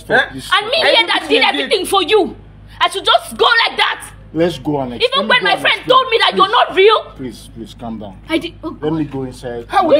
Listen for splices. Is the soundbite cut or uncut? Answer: uncut